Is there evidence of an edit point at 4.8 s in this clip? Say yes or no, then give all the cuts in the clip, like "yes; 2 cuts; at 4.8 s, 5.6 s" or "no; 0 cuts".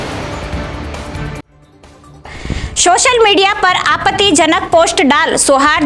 no; 1 cut; at 1.5 s